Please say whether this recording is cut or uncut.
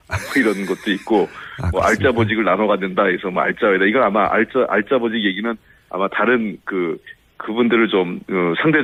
uncut